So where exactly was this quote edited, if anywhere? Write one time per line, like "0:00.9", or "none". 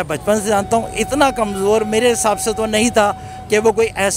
none